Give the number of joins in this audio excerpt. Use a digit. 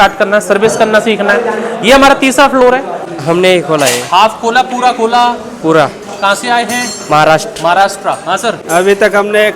2